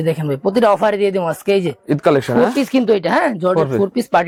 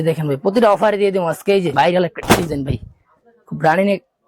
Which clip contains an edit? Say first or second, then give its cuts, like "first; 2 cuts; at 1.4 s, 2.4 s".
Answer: second; 1 cut; at 1.7 s